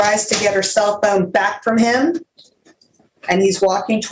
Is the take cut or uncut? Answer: uncut